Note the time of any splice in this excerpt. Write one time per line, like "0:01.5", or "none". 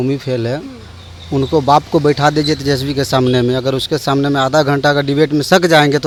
none

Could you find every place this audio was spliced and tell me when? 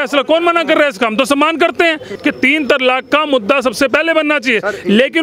0:02.1

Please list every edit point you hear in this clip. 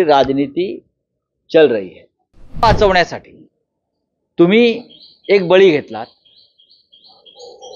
0:02.6

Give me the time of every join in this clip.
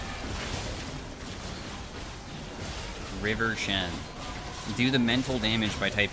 none

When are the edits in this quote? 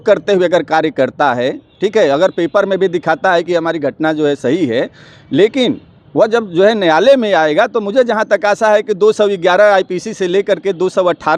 none

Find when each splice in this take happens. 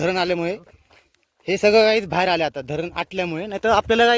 none

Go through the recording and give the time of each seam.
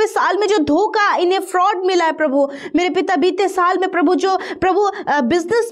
none

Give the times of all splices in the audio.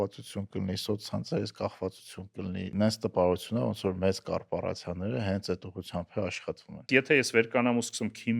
0:02.7
0:06.9

